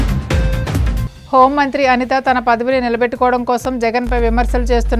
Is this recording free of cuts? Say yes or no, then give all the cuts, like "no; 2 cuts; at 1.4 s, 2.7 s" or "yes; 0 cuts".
no; 1 cut; at 1.0 s